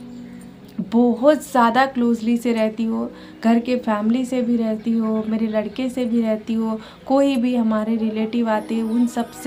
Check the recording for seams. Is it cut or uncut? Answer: uncut